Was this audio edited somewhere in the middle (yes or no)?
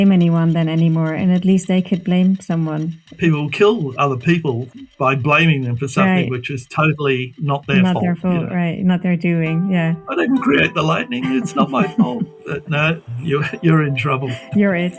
no